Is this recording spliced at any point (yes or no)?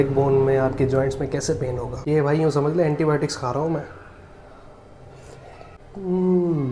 yes